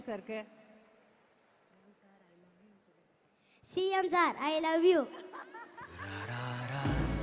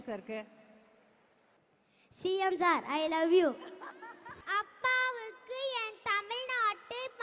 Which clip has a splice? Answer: second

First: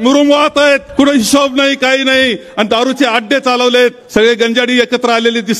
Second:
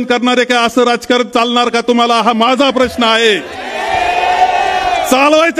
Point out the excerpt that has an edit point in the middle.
first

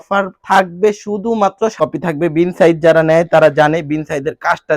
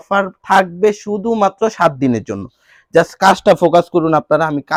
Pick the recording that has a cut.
first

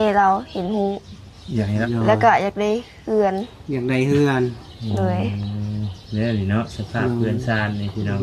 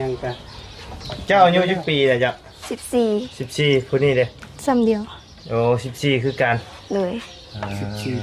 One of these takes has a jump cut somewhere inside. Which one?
first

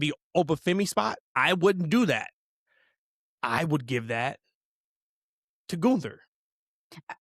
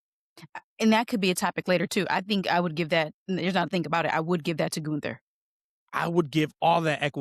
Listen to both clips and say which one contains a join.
first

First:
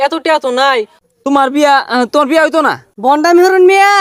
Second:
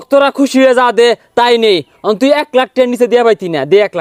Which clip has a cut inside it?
first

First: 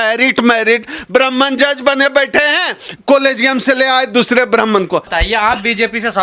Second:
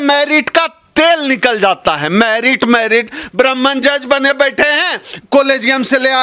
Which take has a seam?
first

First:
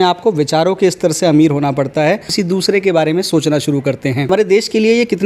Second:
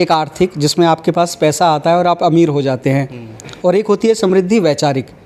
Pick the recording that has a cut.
first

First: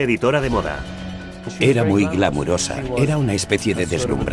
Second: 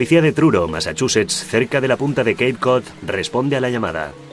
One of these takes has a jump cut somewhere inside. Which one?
second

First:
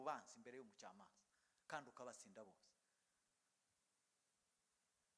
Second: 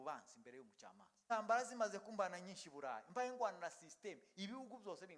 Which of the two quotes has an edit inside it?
second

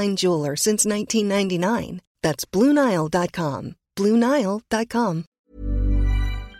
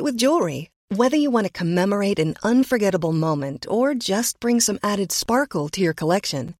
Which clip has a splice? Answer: first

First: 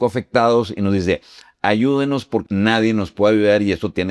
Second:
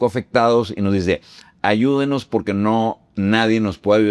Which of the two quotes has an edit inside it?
first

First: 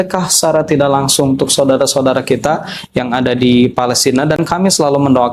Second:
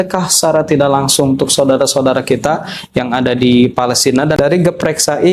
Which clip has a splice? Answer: second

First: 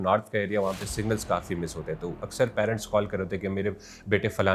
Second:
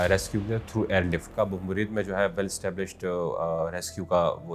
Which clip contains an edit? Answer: second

